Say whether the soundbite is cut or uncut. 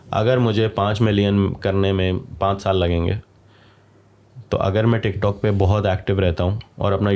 uncut